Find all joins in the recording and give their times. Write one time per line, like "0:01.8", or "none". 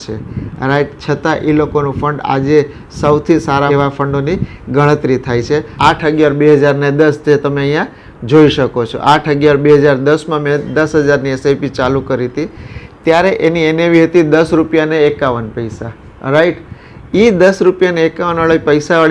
0:05.7